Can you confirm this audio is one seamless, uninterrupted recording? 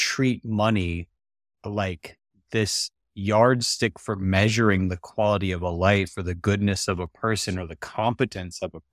yes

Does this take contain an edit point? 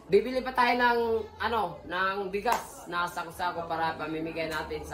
no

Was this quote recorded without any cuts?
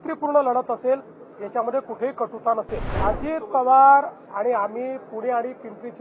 no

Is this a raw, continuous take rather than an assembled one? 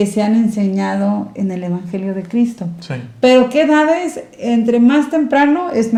yes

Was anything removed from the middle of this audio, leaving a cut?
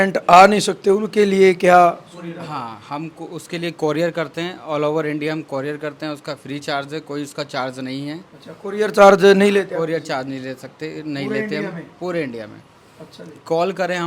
no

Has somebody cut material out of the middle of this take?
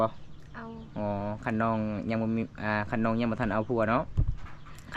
no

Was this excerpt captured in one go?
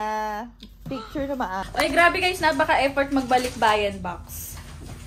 no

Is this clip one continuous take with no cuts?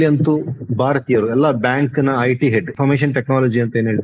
no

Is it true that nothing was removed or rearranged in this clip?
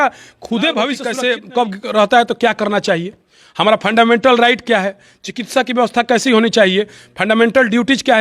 no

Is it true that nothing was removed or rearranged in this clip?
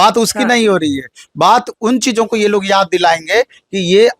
yes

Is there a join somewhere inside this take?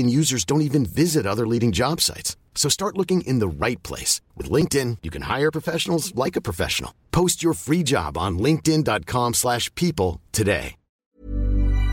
yes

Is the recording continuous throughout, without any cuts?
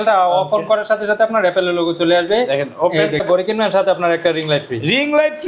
no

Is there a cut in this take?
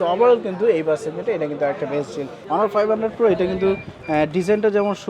yes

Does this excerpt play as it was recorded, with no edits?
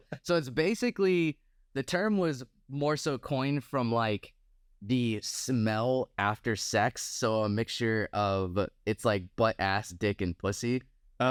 yes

